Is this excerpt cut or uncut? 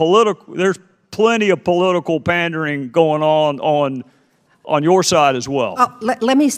uncut